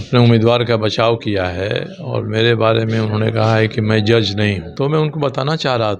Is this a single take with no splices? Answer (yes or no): no